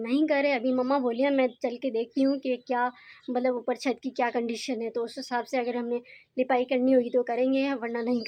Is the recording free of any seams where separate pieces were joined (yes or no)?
yes